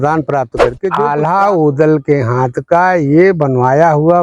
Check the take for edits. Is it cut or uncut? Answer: cut